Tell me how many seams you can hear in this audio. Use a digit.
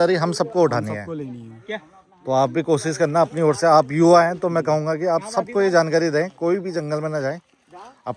0